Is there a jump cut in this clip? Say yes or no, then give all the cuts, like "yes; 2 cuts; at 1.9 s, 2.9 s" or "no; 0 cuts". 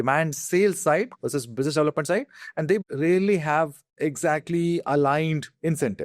yes; 2 cuts; at 2.8 s, 3.8 s